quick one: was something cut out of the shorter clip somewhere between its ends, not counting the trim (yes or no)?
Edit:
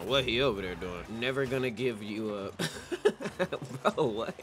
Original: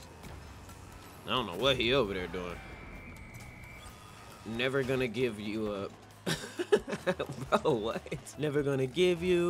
yes